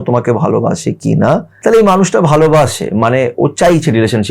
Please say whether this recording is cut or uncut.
cut